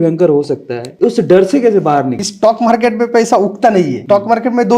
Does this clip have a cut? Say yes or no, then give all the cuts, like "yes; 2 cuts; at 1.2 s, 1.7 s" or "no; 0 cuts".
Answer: yes; 2 cuts; at 2.2 s, 4.0 s